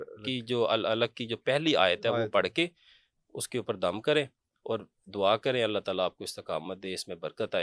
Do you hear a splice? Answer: no; 0 cuts

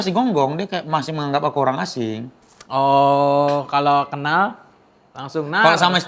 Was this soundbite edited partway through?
no; 0 cuts

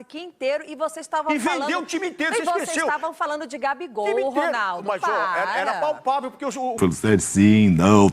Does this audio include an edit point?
yes; 1 cut; at 6.8 s

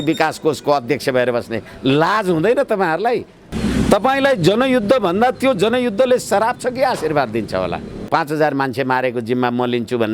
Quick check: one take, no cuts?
no; 2 cuts; at 3.4 s, 8.1 s

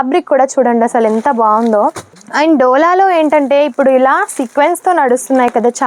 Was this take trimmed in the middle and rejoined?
no; 0 cuts

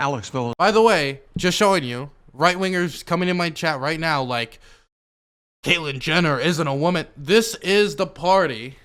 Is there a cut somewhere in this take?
no; 0 cuts

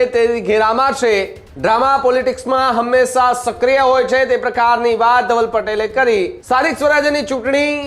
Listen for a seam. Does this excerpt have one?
yes; 2 cuts; at 1.4 s, 6.4 s

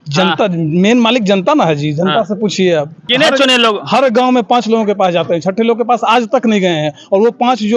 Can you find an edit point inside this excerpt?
yes; 1 cut; at 3.0 s

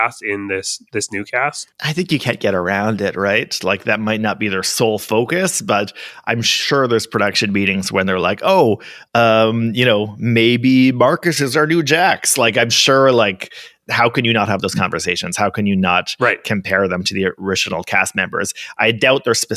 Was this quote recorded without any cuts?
yes; 0 cuts

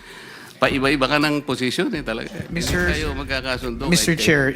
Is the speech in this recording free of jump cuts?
no; 1 cut; at 2.4 s

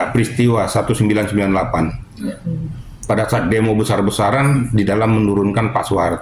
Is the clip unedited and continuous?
yes; 0 cuts

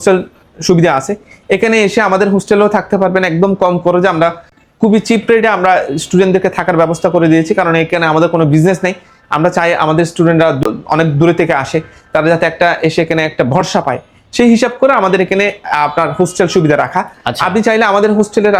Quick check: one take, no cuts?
yes; 0 cuts

